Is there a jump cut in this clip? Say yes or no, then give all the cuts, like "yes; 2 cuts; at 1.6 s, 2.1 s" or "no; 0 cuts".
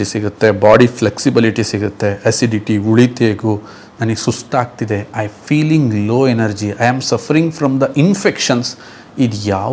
no; 0 cuts